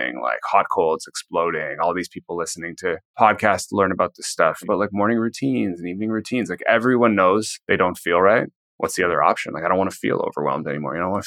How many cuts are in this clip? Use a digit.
4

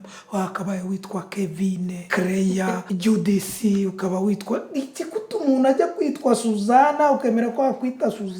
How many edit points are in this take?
1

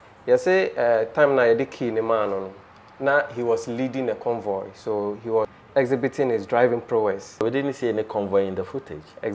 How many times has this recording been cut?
0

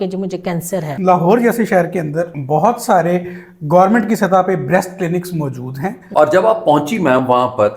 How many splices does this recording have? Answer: 3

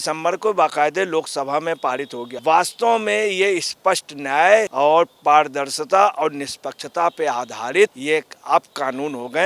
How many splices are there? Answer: 3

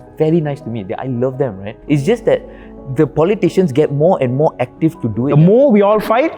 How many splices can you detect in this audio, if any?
2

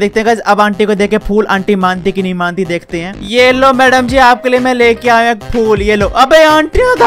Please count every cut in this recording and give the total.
1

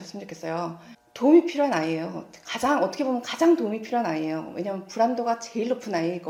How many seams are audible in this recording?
0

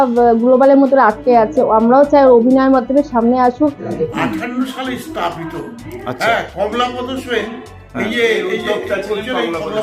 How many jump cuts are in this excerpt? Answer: 1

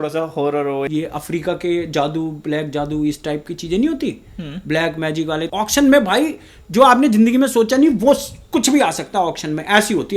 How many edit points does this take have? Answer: 2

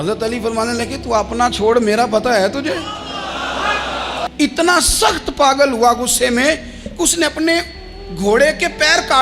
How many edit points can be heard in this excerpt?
1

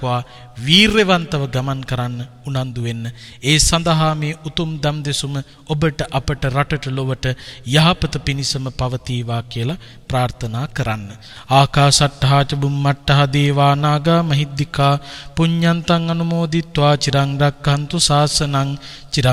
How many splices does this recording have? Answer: 0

